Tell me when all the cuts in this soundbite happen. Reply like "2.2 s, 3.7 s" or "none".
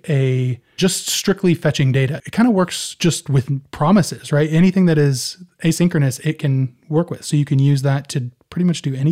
2.2 s